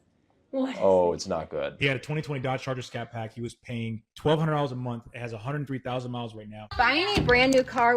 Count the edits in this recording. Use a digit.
2